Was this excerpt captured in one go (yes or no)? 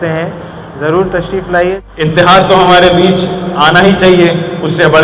no